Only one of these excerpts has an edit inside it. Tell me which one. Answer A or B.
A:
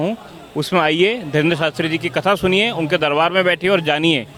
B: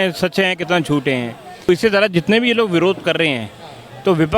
B